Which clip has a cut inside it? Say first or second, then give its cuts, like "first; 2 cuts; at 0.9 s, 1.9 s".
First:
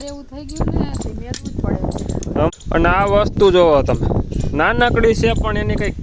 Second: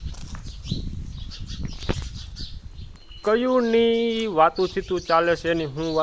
first; 1 cut; at 2.5 s